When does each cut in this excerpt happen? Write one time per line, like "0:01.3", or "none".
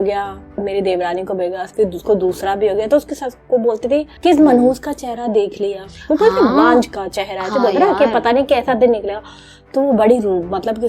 0:01.7
0:04.1

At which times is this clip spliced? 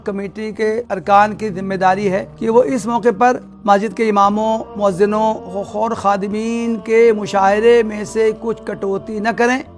0:00.9
0:02.3
0:03.5
0:04.7
0:05.5

